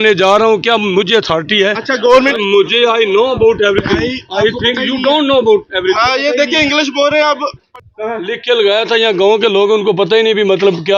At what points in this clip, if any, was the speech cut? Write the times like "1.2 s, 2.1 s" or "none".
2.3 s, 7.6 s